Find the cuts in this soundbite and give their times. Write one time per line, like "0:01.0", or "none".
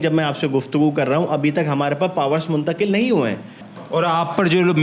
0:03.7

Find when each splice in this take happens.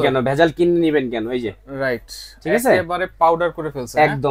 none

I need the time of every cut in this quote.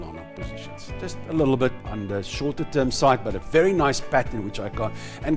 0:01.8

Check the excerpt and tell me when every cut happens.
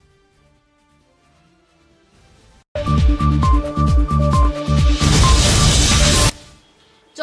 0:06.3

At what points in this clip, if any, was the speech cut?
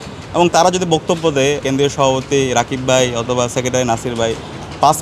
0:01.6

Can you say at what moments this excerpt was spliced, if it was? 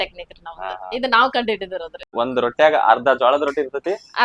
0:02.1

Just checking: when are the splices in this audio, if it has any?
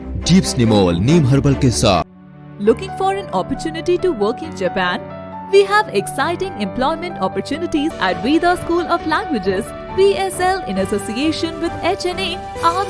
0:02.1
0:08.0

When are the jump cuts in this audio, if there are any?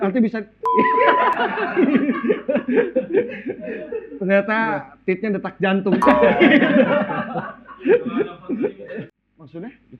0:08.9

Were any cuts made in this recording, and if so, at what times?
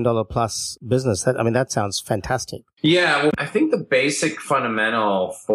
0:03.3

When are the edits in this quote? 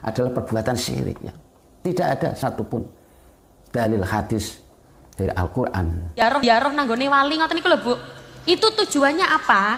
0:06.2

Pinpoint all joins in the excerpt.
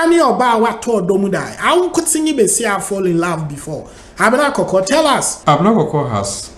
0:05.3

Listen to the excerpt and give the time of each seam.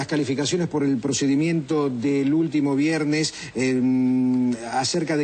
none

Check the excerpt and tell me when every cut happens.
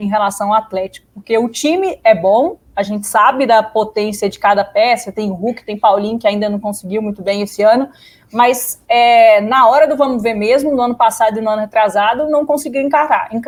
none

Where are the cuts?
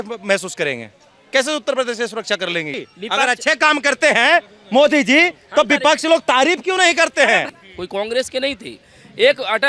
0:02.9
0:07.6

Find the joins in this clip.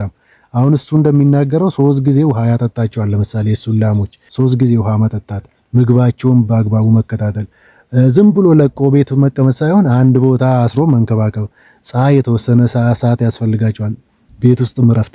0:04.2

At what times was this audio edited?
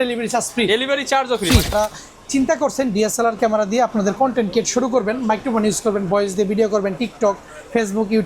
0:01.7

